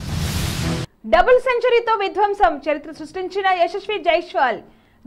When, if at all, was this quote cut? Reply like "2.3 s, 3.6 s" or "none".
0.9 s